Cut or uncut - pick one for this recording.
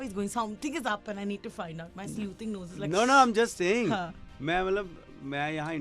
uncut